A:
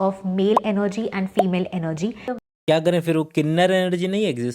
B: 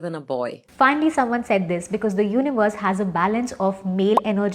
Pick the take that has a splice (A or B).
A